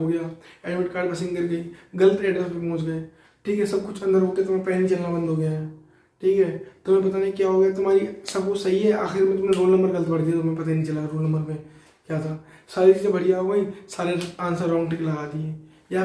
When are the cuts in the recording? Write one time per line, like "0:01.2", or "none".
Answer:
none